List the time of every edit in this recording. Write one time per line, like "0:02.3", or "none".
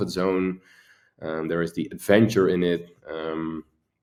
none